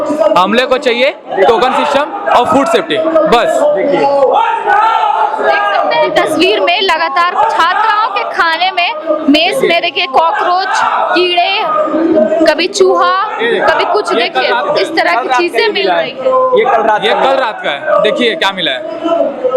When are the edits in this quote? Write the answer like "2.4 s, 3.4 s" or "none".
none